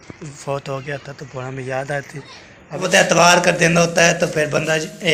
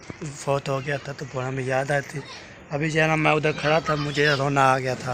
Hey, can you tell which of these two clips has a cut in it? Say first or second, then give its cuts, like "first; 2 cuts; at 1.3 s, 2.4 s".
first; 1 cut; at 2.8 s